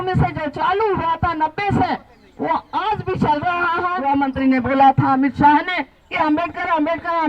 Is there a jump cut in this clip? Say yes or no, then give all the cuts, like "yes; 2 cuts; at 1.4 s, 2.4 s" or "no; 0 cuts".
yes; 1 cut; at 4.0 s